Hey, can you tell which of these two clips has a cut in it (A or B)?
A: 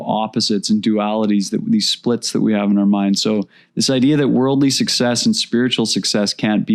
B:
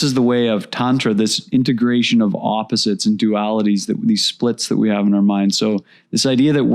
B